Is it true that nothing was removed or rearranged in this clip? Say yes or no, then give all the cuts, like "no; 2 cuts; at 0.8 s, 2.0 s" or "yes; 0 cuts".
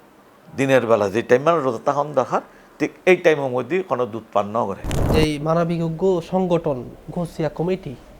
no; 1 cut; at 5.0 s